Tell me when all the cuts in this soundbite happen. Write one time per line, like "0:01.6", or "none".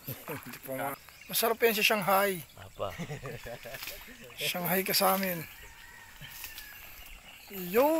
0:01.0